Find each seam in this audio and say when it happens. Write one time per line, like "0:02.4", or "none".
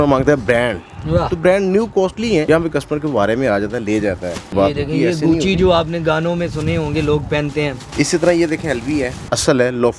0:02.4
0:04.5
0:07.8
0:09.2